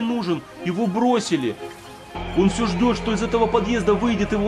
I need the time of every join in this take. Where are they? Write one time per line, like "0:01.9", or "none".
none